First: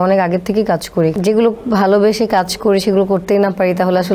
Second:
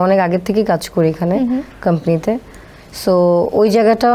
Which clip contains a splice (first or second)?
first